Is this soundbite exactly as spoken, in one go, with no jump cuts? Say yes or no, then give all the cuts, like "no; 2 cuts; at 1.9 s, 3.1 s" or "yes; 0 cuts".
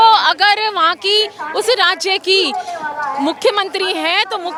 yes; 0 cuts